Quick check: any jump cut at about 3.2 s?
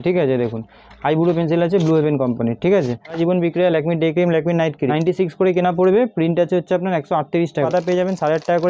yes; 3 cuts; at 3.2 s, 4.9 s, 7.7 s

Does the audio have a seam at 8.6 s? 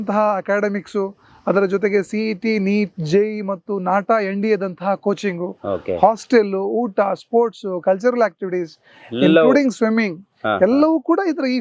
no; 0 cuts

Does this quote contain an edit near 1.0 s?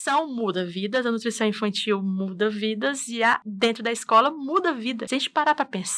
no; 2 cuts; at 3.5 s, 5.0 s

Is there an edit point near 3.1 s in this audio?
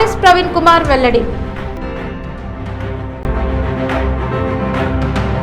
yes; 1 cut; at 3.1 s

